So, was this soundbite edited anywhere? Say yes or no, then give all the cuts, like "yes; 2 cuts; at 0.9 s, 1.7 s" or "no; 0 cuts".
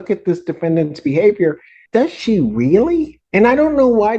yes; 2 cuts; at 1.7 s, 3.2 s